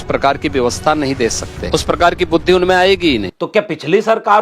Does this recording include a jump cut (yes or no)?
yes